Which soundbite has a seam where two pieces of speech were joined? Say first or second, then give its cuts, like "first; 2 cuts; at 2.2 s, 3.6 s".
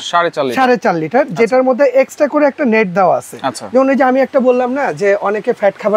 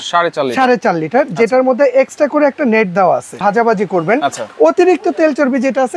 second; 1 cut; at 3.4 s